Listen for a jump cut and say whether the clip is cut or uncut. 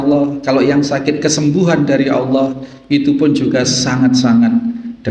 uncut